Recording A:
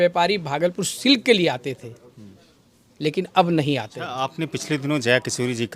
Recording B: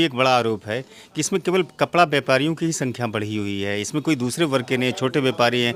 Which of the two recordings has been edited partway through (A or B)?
A